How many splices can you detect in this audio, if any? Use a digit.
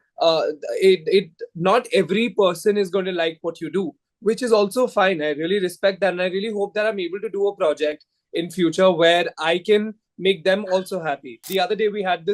1